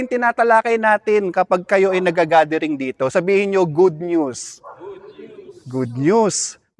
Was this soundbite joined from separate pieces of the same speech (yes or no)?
no